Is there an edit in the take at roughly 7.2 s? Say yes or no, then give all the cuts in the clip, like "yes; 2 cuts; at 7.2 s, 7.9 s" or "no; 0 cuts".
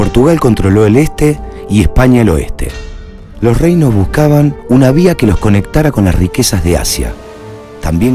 yes; 1 cut; at 7.2 s